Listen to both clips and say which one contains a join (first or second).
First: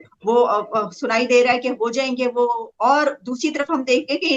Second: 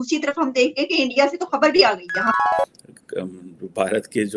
second